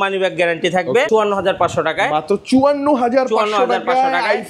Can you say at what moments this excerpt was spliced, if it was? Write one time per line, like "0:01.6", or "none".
0:01.1

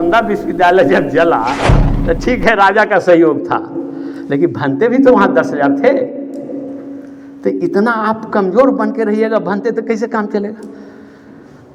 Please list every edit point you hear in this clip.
none

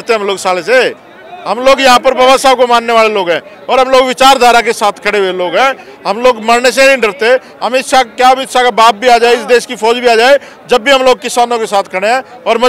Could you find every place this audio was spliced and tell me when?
none

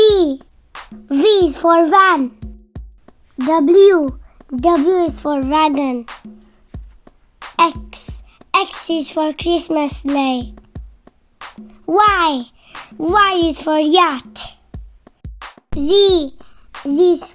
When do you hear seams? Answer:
none

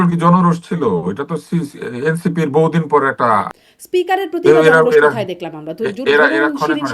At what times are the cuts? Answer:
0:03.5

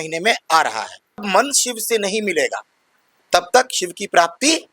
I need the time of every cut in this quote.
0:01.2

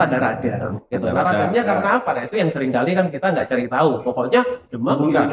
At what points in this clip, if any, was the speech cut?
none

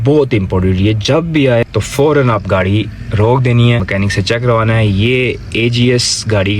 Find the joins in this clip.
0:01.6
0:03.9

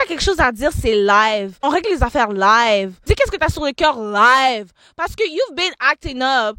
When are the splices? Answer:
none

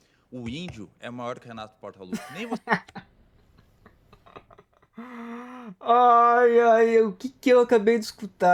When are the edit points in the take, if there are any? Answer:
none

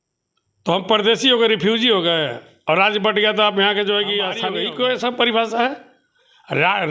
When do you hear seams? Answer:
0:04.5

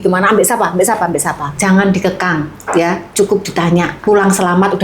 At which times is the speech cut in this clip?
0:01.5
0:03.9

